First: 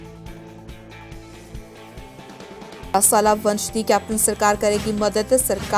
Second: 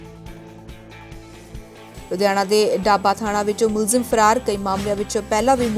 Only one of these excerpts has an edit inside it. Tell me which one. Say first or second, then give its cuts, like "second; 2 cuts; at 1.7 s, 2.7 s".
first; 1 cut; at 1.9 s